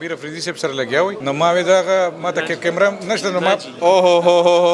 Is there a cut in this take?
yes; 1 cut; at 1.2 s

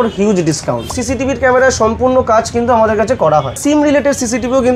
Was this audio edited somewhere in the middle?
yes; 2 cuts; at 1.0 s, 3.6 s

